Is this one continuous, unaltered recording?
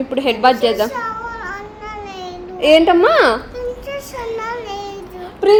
yes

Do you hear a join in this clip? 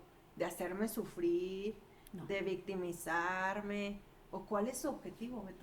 no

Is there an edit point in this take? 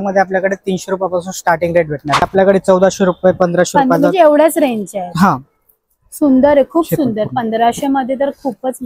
yes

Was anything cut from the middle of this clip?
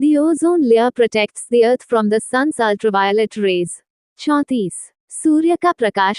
no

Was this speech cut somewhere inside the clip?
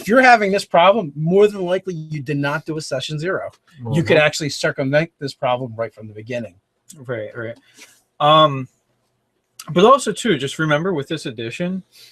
no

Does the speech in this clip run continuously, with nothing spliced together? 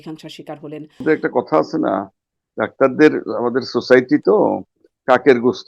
no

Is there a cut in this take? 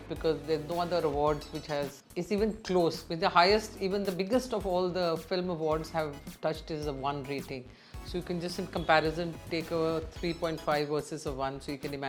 no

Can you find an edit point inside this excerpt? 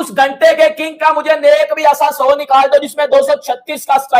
no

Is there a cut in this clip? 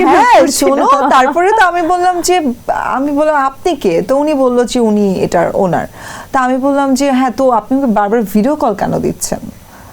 no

